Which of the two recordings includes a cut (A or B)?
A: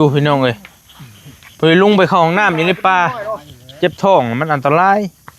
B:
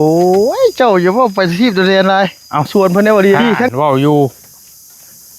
B